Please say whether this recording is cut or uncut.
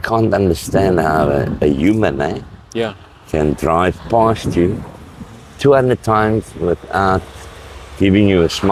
uncut